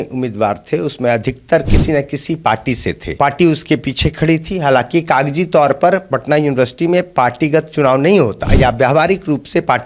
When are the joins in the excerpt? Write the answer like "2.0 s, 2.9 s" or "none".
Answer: 3.1 s, 8.4 s